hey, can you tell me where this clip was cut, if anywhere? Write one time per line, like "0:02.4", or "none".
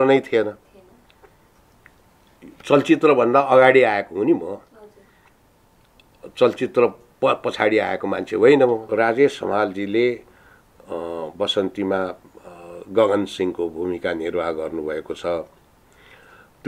0:08.9